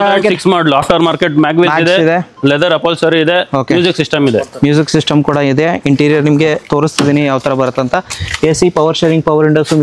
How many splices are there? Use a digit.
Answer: 0